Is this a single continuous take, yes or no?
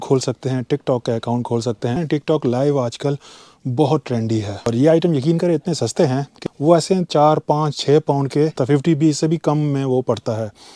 no